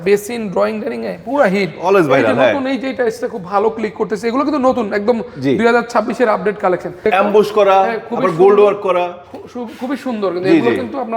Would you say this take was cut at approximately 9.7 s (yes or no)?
no